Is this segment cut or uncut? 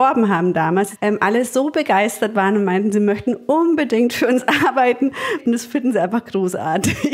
cut